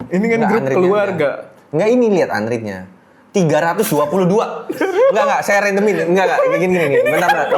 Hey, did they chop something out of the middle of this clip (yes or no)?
no